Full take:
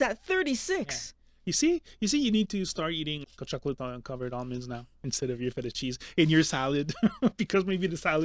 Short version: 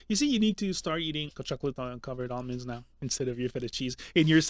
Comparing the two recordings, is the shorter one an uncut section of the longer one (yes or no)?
no